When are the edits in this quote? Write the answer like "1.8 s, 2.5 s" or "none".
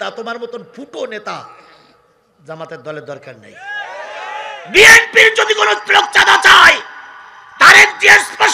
none